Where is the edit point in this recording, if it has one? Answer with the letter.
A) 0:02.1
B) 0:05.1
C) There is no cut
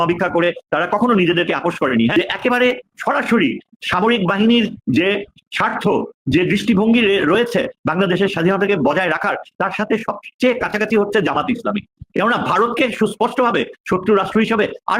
A